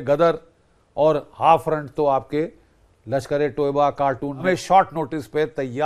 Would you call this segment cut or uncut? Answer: cut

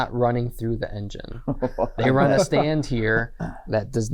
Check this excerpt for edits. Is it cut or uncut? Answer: uncut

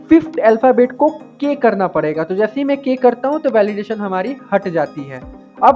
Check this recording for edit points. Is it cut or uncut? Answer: uncut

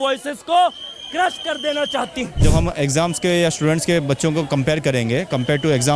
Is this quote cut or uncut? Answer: cut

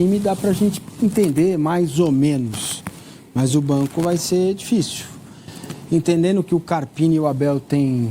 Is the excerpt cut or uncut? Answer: uncut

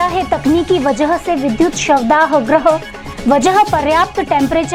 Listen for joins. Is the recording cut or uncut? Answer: uncut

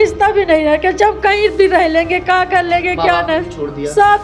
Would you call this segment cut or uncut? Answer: uncut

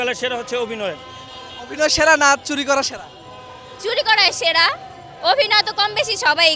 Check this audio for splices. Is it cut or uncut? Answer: uncut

